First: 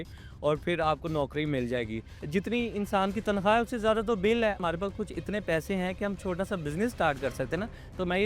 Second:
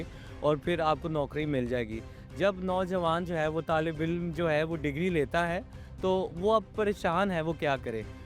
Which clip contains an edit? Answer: first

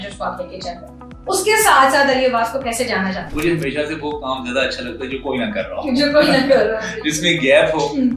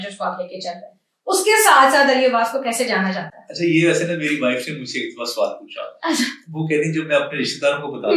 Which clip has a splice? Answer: first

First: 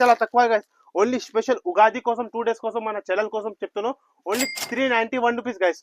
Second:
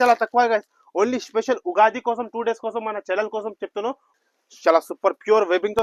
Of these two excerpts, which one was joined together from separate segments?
second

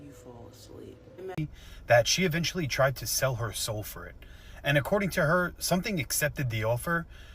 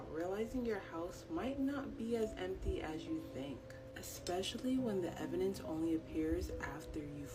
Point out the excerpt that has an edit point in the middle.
first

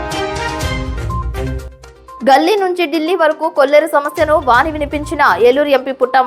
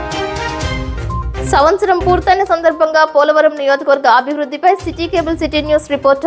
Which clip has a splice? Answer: second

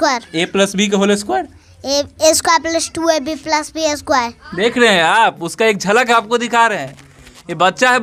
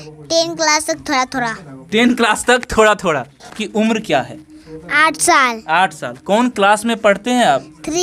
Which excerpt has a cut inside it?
second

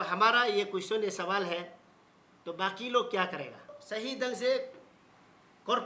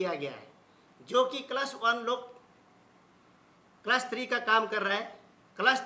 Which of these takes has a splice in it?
first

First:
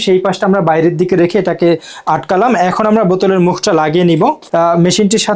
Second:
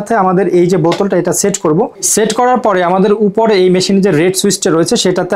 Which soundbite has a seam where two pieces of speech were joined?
first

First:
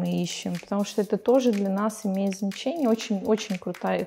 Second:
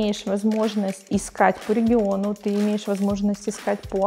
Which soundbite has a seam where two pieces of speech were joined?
second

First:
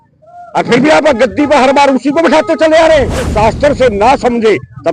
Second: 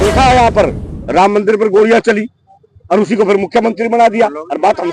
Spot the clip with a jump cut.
first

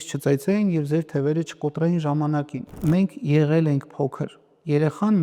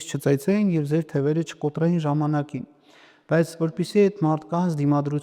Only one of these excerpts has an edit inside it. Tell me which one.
first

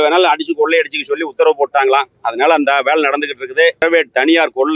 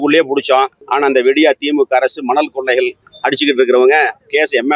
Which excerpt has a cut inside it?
first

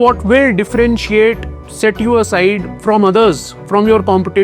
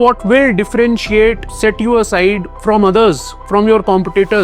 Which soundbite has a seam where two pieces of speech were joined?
second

